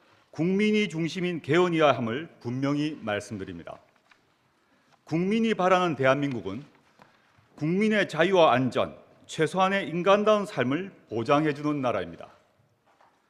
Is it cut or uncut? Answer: uncut